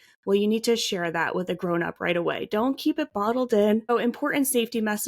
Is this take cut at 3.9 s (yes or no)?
yes